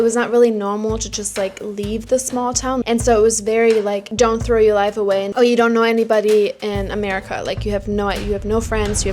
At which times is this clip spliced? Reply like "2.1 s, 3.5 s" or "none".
2.8 s, 4.1 s